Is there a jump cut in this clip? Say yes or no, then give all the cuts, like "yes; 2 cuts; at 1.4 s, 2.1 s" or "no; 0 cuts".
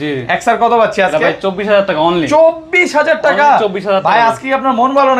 no; 0 cuts